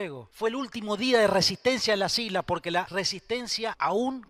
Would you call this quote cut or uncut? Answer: uncut